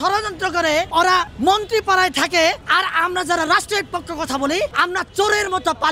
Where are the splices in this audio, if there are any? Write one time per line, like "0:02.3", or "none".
0:01.1
0:02.6
0:04.7